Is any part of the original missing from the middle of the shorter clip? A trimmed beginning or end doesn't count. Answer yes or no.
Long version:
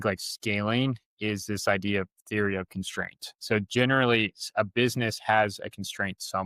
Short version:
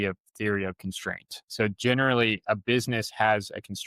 yes